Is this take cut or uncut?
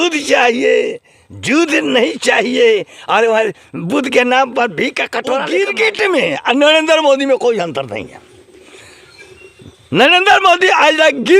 cut